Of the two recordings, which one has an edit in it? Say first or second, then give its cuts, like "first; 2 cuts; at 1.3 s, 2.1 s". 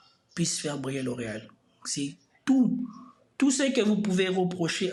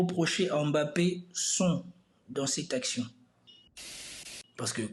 second; 1 cut; at 3.8 s